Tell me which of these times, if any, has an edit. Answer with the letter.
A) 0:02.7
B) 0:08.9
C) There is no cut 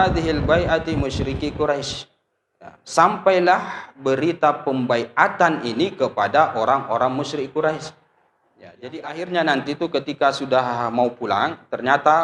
B